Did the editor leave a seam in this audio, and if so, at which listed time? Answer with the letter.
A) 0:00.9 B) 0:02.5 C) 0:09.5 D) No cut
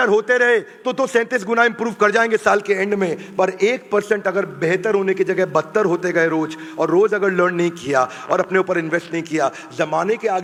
D